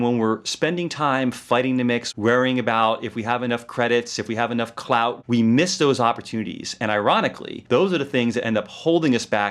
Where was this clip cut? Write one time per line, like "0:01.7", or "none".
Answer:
0:02.1
0:05.2

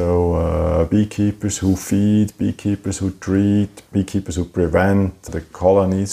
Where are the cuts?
0:03.8

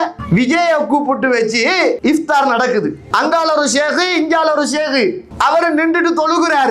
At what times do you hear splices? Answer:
0:02.0
0:03.0
0:05.3

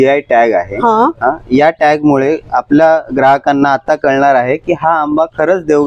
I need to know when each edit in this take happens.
none

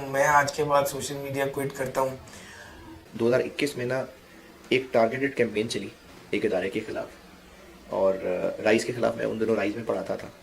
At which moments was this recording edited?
0:03.1

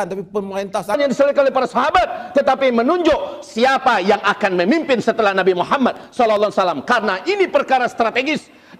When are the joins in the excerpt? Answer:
0:01.0

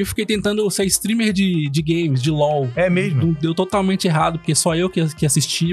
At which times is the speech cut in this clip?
none

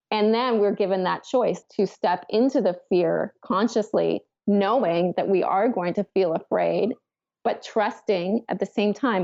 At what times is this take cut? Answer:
0:01.6

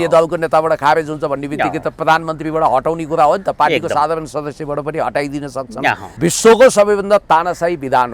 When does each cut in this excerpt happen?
0:06.1

